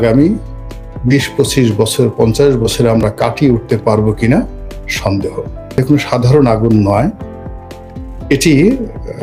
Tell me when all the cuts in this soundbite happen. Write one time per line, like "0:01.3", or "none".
0:05.7